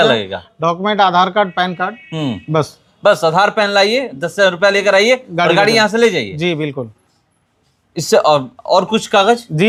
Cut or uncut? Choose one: uncut